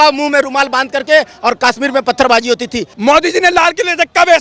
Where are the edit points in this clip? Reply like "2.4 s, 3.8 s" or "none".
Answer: 2.8 s